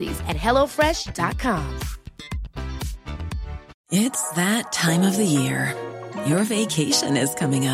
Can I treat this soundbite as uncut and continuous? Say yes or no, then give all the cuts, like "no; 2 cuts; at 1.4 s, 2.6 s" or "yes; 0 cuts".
no; 1 cut; at 3.7 s